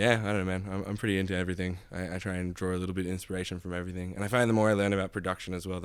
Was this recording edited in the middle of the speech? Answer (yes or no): no